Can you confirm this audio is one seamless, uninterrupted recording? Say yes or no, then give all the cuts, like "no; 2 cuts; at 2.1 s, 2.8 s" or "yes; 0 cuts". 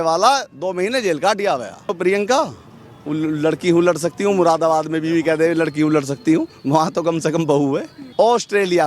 no; 2 cuts; at 1.9 s, 8.0 s